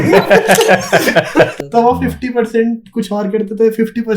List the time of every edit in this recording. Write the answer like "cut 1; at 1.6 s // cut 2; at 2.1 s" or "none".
cut 1; at 1.5 s